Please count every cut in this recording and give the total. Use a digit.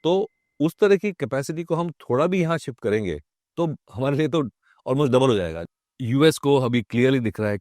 1